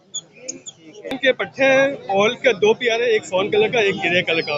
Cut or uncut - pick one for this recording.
cut